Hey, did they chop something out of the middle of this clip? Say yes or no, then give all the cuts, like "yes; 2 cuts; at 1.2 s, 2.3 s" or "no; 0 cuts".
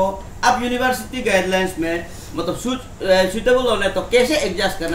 no; 0 cuts